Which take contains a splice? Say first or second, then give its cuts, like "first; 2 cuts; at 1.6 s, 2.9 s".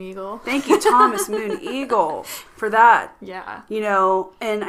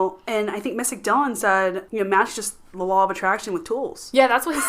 second; 1 cut; at 1.8 s